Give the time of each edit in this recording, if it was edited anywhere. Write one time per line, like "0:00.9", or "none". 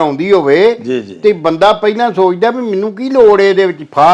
none